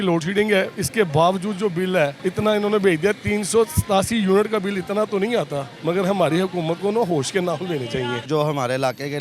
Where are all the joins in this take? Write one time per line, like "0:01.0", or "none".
0:02.2
0:05.7
0:08.3